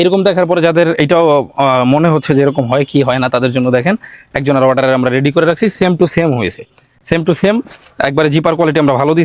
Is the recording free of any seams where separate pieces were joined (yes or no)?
yes